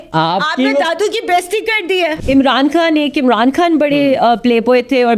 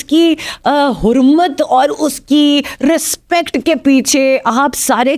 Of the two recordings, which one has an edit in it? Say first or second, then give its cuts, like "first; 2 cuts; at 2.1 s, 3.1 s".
first; 1 cut; at 2.1 s